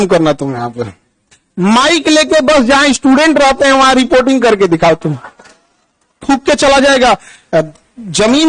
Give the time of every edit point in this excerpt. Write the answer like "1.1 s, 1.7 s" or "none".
6.2 s